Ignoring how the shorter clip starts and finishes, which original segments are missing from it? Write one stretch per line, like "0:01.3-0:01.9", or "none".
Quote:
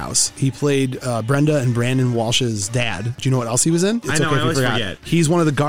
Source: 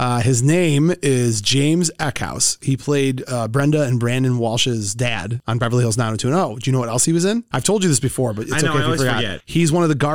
0:05.4-0:06.6
0:07.5-0:08.5